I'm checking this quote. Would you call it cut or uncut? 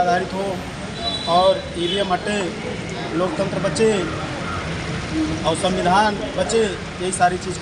uncut